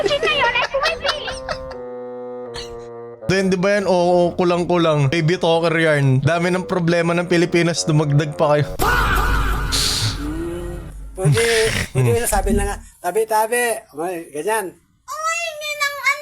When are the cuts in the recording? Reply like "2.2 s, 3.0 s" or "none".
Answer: none